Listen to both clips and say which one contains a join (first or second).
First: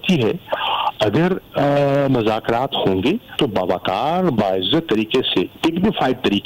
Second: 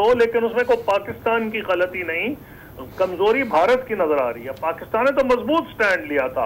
first